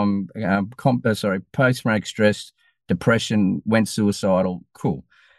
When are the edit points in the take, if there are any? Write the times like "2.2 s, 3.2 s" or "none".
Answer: none